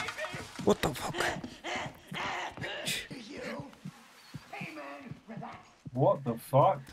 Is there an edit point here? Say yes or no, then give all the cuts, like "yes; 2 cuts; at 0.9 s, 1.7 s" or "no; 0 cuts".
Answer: yes; 1 cut; at 3.1 s